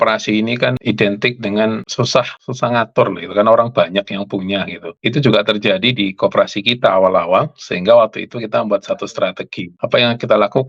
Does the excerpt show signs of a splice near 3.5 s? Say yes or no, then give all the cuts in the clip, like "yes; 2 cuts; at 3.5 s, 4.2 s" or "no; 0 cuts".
no; 3 cuts; at 0.8 s, 2.1 s, 4.8 s